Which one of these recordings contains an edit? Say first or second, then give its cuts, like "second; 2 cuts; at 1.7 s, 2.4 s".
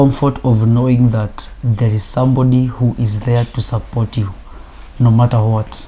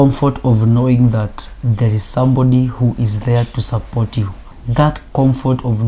second; 1 cut; at 4.6 s